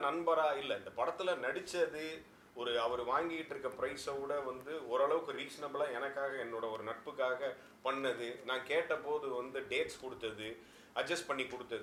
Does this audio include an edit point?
no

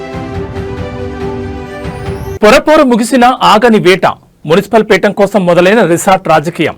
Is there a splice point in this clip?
yes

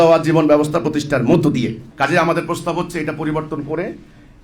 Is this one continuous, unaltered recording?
no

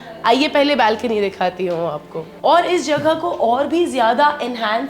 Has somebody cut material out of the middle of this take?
yes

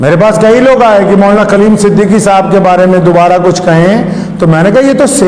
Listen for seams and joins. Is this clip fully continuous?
yes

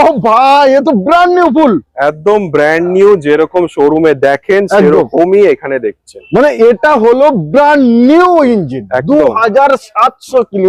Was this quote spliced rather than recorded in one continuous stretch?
no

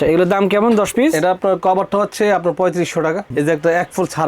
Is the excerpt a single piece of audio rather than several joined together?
no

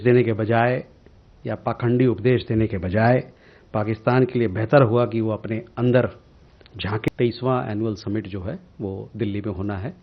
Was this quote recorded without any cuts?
no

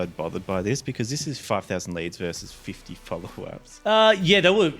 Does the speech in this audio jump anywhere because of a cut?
yes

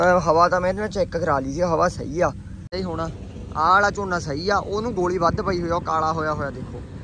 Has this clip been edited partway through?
yes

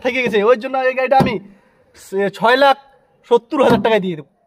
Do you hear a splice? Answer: no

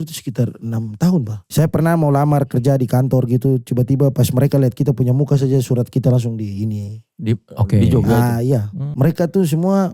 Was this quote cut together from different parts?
yes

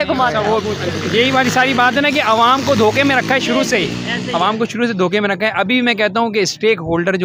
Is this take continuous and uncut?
yes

